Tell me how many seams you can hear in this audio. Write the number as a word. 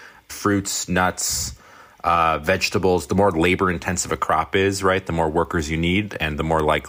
zero